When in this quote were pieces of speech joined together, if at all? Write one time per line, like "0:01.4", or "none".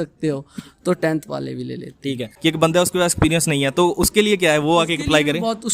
0:02.3

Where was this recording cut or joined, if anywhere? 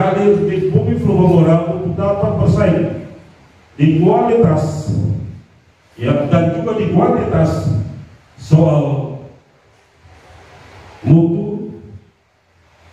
none

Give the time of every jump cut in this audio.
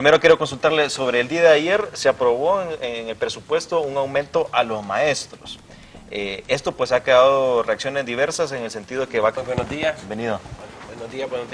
none

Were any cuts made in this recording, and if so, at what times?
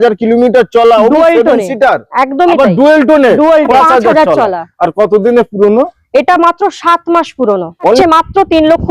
0:03.7
0:08.0

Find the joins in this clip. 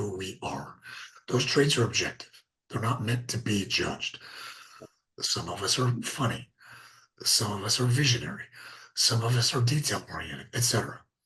none

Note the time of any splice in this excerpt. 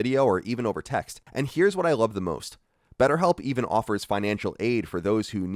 0:01.2

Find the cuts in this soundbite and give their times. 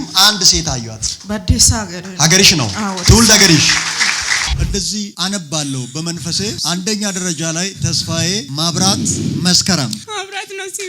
0:04.5

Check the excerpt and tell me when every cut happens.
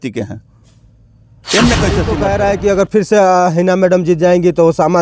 0:02.1

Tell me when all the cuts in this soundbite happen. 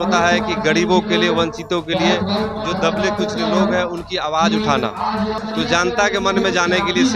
0:05.4

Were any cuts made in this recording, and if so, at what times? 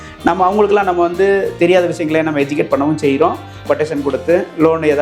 none

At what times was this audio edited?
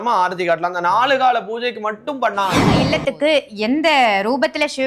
0:02.8

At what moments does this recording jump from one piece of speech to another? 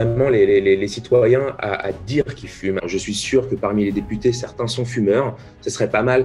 0:02.9

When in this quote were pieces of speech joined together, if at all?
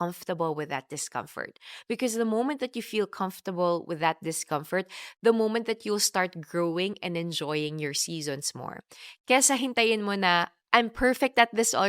none

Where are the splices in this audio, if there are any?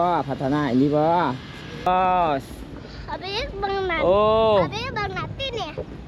0:01.9

